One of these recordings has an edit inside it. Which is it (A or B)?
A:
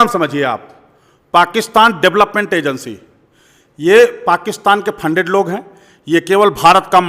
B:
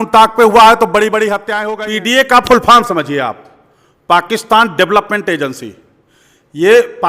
B